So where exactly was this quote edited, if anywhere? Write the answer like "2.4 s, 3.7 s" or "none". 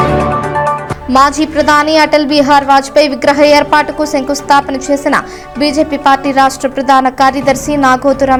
none